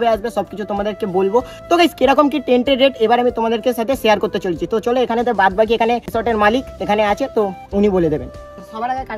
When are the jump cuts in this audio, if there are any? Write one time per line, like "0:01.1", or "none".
none